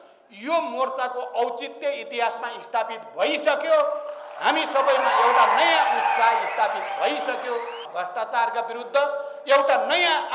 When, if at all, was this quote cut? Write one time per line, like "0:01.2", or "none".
0:07.8